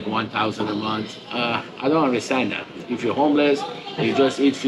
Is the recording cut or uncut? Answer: cut